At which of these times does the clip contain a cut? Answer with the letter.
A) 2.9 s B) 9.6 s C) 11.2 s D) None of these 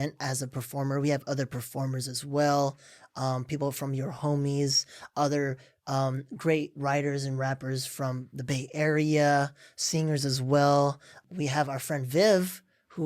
C